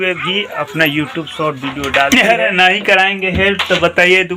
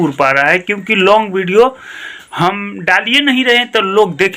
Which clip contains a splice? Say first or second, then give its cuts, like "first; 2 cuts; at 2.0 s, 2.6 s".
first; 1 cut; at 2.1 s